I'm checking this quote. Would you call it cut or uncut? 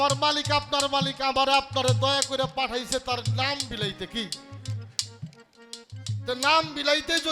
uncut